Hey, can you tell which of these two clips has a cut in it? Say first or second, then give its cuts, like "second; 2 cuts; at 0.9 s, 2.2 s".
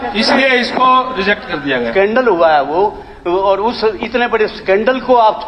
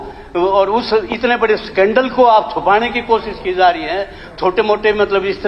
first; 1 cut; at 1.9 s